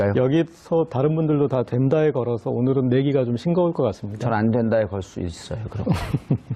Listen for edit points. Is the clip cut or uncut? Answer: uncut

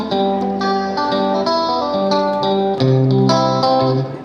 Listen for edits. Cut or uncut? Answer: uncut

